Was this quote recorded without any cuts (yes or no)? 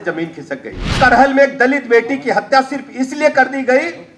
no